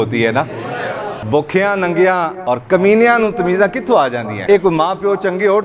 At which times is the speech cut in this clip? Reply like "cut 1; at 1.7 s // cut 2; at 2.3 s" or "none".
cut 1; at 1.2 s // cut 2; at 2.3 s // cut 3; at 4.3 s